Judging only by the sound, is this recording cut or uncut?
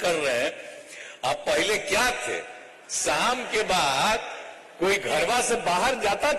uncut